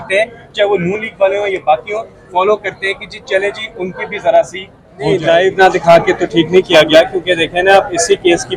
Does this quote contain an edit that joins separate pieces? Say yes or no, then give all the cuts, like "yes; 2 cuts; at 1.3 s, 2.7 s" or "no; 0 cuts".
yes; 1 cut; at 5.1 s